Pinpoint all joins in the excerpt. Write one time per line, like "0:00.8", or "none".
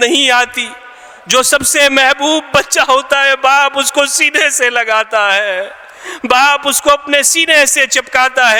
none

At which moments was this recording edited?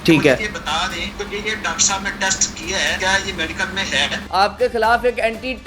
0:01.1
0:03.0
0:04.2

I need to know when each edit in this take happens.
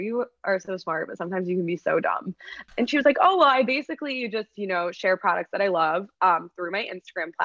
0:02.6

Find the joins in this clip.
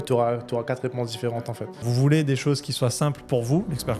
0:01.3

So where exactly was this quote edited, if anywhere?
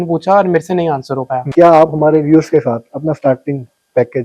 0:01.5

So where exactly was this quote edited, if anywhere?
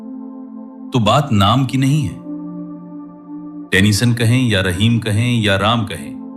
0:00.9
0:02.1
0:03.7

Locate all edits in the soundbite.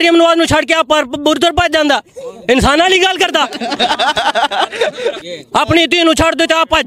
0:05.2

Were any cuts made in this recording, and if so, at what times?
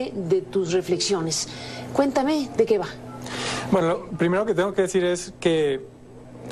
none

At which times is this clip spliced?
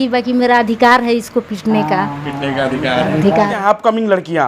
0:03.6

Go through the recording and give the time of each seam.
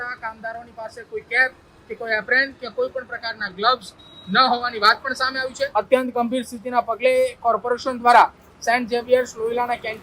0:05.7

